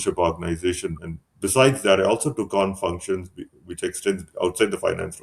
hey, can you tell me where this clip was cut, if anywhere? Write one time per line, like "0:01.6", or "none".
none